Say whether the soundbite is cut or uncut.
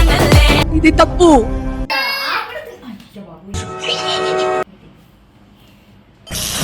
cut